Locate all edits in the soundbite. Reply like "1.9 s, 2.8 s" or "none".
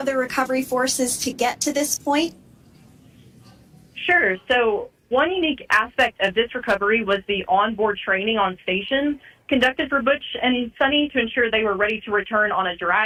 none